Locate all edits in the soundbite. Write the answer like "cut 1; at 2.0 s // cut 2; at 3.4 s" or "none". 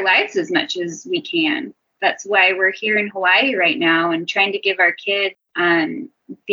none